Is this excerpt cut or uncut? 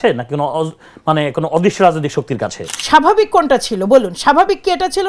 cut